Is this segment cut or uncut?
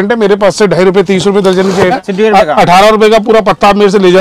cut